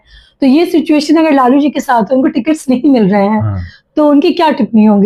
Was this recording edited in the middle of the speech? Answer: no; 0 cuts

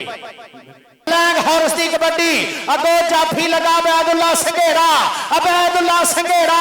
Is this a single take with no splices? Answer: no; 1 cut; at 1.1 s

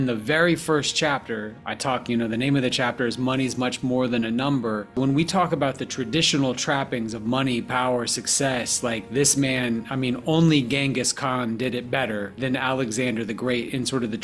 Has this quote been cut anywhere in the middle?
yes; 2 cuts; at 5.0 s, 12.4 s

